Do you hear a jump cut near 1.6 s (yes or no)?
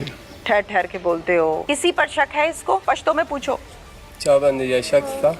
yes